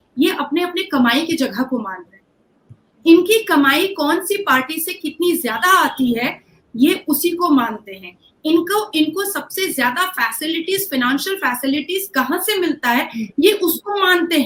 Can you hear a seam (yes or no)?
no